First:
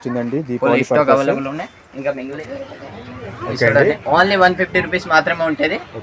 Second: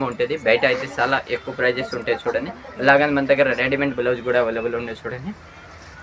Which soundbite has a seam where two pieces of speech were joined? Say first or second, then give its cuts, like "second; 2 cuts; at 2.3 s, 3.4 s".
first; 1 cut; at 2.4 s